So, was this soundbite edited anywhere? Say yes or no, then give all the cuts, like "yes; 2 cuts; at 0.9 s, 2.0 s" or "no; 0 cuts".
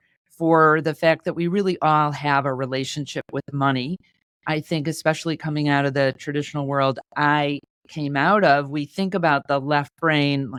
no; 0 cuts